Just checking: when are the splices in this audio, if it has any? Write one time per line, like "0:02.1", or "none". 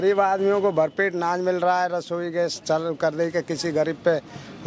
none